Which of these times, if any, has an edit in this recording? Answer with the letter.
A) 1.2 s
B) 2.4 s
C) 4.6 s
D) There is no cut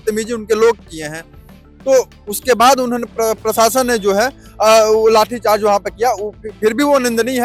D